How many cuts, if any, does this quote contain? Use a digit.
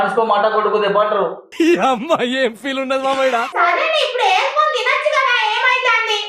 1